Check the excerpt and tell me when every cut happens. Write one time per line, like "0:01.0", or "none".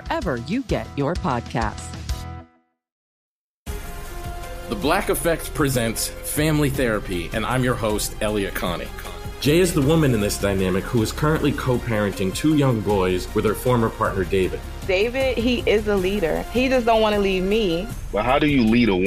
0:03.1